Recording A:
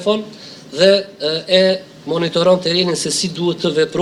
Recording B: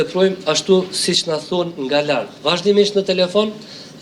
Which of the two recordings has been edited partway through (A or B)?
B